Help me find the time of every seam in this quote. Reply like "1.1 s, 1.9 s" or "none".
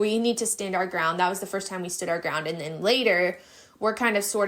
none